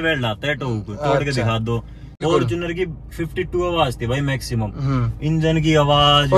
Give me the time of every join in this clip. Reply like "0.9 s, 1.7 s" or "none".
2.2 s